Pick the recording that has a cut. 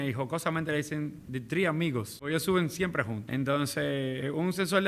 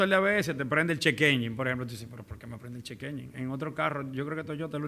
first; 2 cuts; at 2.2 s, 3.2 s

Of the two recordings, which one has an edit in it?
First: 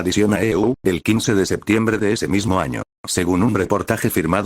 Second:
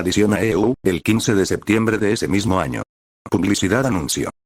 first; 1 cut; at 3.0 s

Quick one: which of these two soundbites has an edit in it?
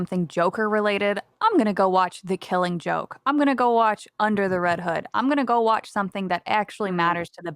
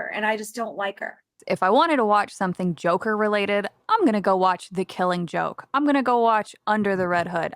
second; 1 cut; at 1.4 s

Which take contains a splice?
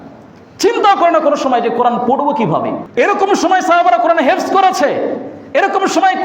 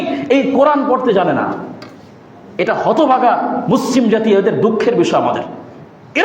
first; 1 cut; at 2.8 s

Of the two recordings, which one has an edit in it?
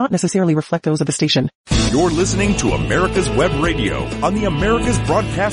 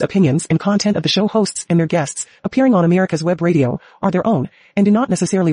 first; 1 cut; at 1.6 s

